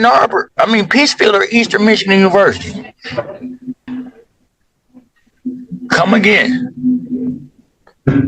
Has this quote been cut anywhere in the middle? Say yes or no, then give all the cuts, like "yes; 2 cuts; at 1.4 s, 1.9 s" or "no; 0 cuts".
yes; 1 cut; at 3.8 s